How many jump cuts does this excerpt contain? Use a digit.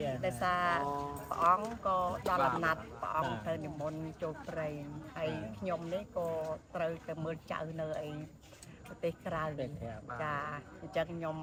0